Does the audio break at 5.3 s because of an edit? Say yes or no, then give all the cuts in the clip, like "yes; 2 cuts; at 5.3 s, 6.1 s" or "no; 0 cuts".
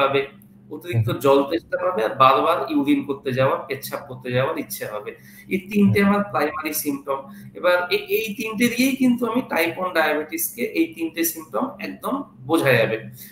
no; 0 cuts